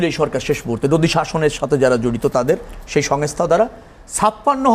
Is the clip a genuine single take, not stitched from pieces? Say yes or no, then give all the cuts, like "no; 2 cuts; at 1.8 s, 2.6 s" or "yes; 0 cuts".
yes; 0 cuts